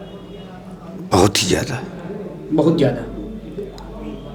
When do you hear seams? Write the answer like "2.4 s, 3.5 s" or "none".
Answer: none